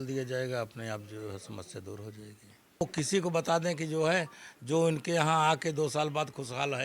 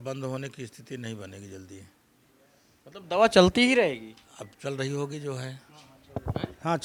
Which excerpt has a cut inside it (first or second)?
first